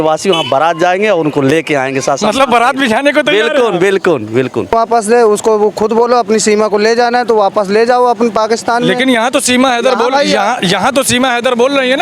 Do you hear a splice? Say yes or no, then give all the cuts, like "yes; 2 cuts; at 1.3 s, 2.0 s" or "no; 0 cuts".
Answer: yes; 1 cut; at 4.7 s